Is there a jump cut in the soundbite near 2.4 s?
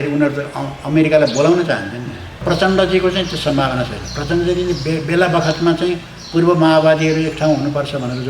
yes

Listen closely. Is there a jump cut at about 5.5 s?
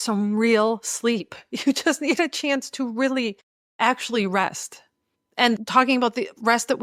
yes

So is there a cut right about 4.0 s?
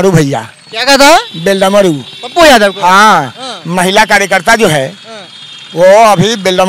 no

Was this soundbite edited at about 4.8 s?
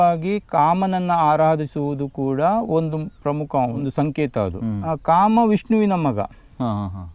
yes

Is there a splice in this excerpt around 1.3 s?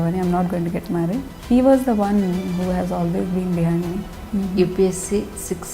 yes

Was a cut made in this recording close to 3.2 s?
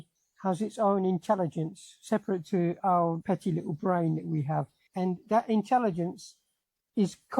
yes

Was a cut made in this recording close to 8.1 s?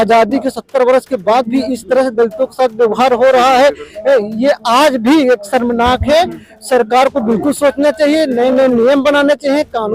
no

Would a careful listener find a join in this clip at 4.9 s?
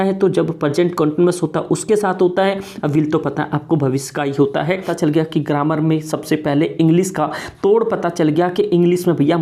yes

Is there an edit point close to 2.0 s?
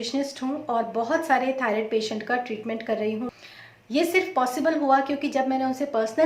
no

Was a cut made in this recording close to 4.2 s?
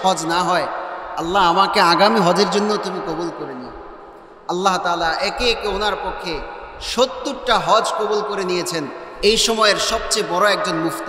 no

